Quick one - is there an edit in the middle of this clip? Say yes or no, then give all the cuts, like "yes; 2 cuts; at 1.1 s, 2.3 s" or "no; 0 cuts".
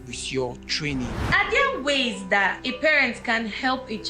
yes; 2 cuts; at 1.2 s, 2.6 s